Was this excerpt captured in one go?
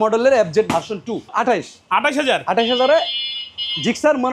no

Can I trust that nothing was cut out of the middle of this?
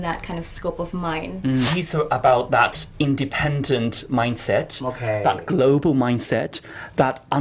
no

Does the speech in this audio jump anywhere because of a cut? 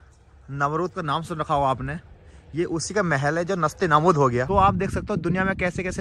yes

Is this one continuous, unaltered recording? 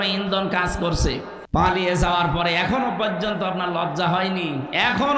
no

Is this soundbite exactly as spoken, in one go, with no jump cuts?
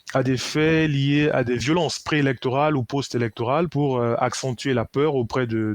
no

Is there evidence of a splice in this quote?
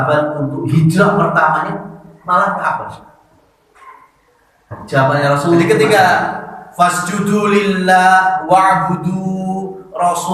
yes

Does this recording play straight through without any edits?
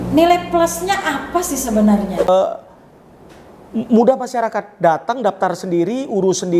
no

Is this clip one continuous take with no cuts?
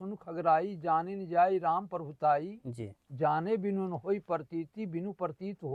yes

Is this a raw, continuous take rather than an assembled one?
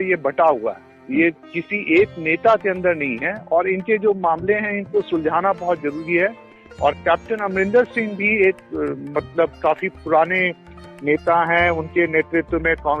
no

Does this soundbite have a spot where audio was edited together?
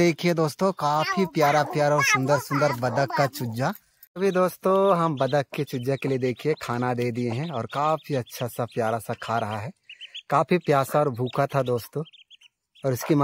yes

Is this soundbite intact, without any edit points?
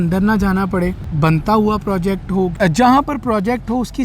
no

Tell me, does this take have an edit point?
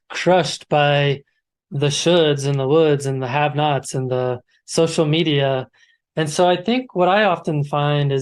no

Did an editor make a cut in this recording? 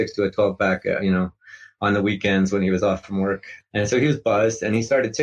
yes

